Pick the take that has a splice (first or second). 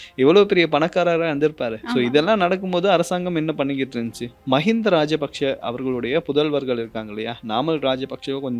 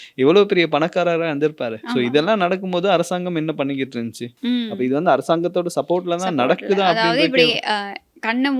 first